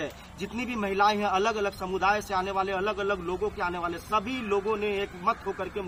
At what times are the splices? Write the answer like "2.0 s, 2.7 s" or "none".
none